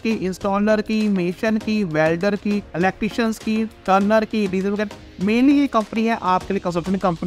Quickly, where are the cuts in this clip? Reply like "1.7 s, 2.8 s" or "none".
none